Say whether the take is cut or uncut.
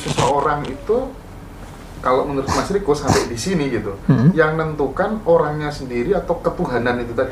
uncut